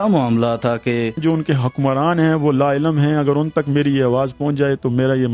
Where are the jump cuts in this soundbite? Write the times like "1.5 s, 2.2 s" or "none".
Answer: 1.2 s